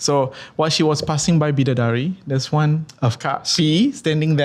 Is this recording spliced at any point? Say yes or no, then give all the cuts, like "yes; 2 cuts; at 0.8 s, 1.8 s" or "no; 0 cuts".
yes; 1 cut; at 2.9 s